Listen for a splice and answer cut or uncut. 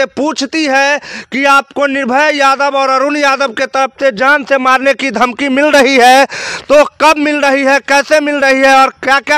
uncut